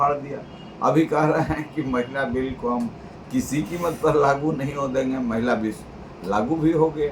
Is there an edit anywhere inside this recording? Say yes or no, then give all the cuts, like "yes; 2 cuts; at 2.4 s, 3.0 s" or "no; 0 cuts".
no; 0 cuts